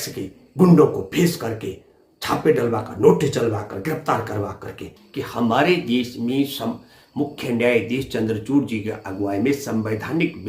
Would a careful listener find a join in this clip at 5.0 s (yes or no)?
yes